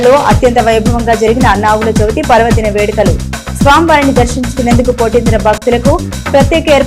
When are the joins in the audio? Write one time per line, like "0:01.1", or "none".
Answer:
none